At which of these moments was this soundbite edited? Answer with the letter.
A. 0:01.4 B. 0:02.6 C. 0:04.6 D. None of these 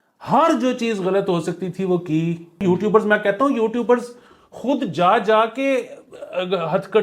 B